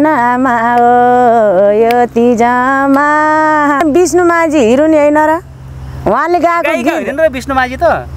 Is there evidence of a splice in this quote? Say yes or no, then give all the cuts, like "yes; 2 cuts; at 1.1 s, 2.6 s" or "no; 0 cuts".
yes; 1 cut; at 3.8 s